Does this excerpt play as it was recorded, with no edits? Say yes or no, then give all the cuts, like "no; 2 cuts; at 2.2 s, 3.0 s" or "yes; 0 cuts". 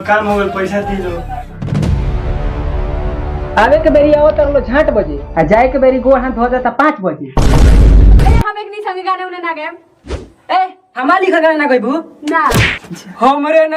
no; 1 cut; at 8.2 s